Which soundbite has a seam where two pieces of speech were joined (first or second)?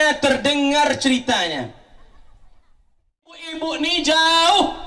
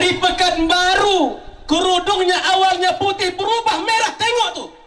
first